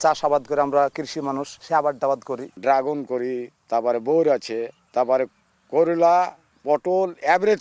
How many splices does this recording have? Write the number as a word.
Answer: five